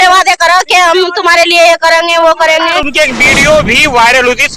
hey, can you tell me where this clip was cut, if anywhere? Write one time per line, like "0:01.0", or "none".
0:02.8